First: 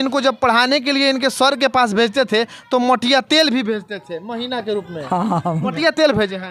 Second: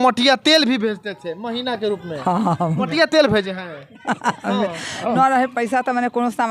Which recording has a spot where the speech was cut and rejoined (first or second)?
second